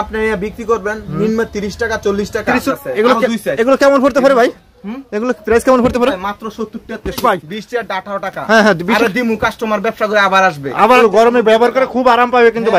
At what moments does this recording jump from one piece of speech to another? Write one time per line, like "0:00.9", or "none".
0:02.7
0:07.2
0:11.0